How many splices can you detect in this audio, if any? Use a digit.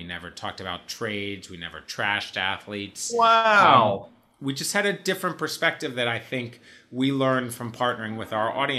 0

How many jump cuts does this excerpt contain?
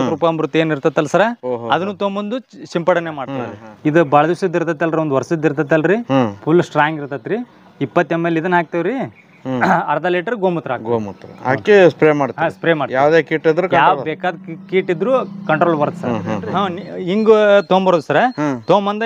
2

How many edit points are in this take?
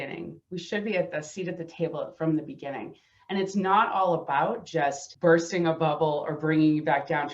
1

